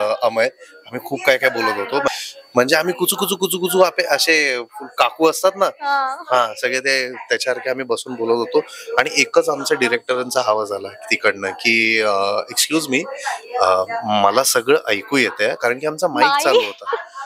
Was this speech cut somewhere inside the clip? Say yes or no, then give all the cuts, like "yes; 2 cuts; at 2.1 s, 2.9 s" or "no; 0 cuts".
yes; 1 cut; at 2.1 s